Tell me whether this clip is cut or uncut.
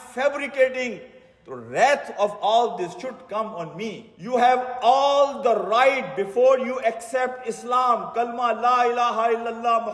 cut